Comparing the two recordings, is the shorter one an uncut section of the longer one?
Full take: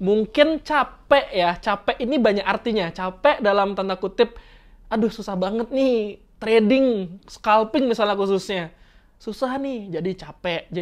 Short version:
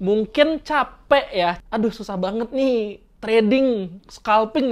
no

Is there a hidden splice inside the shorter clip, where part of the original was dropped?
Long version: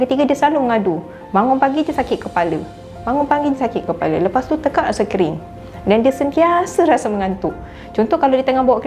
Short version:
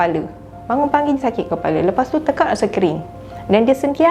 no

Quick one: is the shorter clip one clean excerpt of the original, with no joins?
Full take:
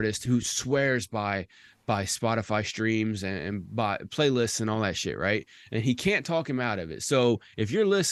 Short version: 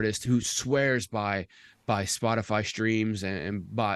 yes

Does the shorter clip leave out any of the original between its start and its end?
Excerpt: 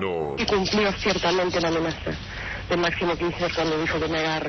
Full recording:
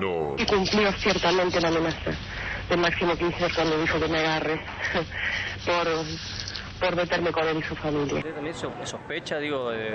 no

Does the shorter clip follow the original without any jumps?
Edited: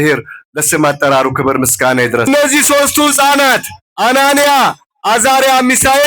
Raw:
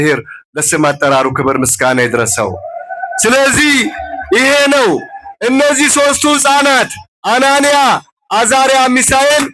no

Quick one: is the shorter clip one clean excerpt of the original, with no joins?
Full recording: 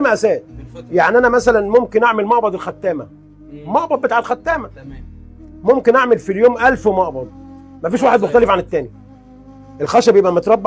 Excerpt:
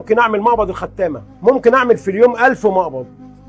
no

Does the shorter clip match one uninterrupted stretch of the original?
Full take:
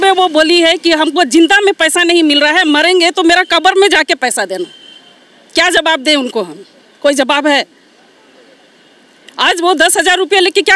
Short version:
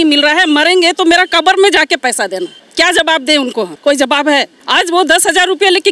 no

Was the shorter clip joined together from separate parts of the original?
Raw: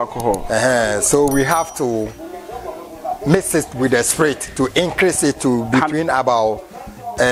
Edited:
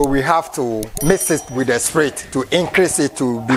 yes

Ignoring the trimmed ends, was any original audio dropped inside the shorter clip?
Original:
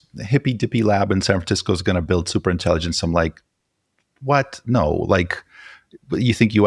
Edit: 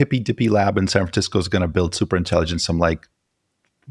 no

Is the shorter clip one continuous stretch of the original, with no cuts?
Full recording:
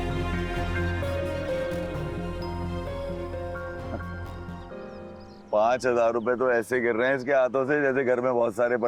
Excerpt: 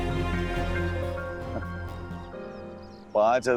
no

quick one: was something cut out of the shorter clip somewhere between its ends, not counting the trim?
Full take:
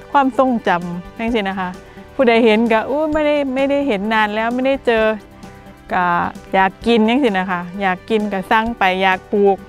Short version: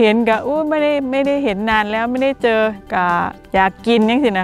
yes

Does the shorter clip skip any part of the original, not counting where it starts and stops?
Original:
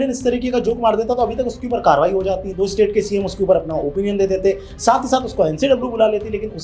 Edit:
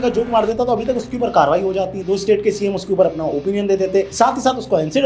yes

